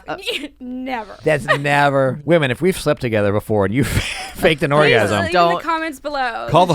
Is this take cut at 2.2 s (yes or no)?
yes